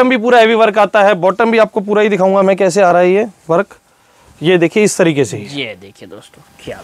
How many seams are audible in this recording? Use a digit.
0